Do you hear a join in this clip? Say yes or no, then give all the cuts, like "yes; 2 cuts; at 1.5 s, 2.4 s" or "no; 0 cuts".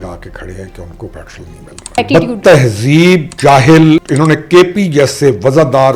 yes; 3 cuts; at 2.0 s, 3.3 s, 4.1 s